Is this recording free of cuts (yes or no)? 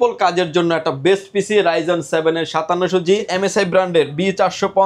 no